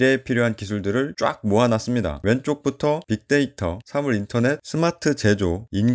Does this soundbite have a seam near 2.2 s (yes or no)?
yes